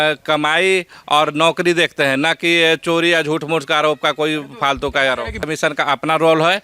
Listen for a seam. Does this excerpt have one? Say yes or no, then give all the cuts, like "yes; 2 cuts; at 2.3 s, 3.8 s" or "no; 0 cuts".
yes; 1 cut; at 5.4 s